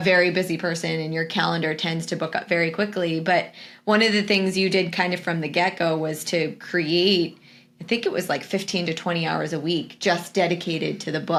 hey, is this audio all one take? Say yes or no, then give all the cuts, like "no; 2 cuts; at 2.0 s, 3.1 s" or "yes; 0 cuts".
yes; 0 cuts